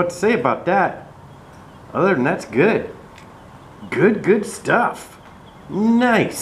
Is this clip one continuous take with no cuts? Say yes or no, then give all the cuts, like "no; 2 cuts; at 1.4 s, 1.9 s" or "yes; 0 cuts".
yes; 0 cuts